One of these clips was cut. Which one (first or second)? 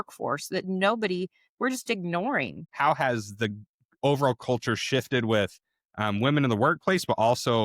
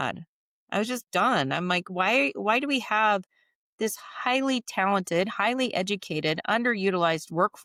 first